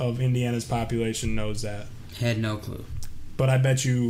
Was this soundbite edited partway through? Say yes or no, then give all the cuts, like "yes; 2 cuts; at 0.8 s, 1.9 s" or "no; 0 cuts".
no; 0 cuts